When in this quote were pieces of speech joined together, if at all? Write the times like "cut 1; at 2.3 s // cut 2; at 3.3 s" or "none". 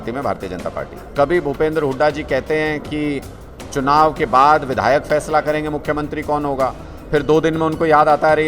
cut 1; at 1.0 s